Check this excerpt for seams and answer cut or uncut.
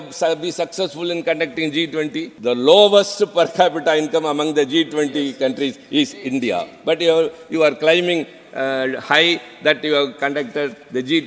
cut